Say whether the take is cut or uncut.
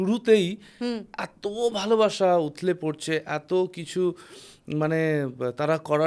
uncut